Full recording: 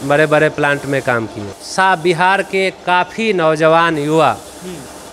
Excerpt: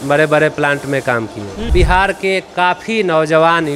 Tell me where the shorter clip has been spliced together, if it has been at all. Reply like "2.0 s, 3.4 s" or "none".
1.7 s